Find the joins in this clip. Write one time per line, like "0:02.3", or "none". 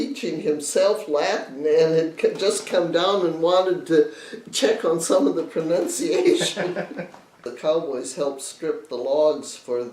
0:07.4

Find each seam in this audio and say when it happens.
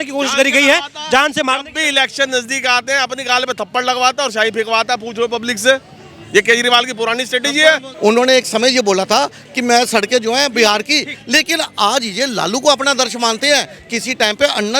0:07.9

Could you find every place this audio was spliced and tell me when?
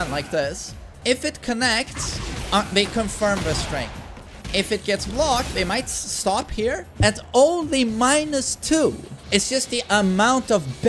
0:01.0
0:04.4
0:09.1

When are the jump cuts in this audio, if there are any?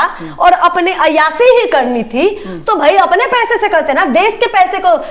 none

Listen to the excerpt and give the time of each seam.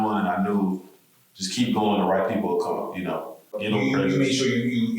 0:03.6

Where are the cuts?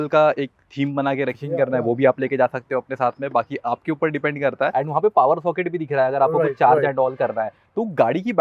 0:01.3
0:04.7

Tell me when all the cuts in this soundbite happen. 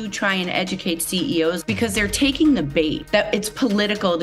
0:01.6
0:03.0

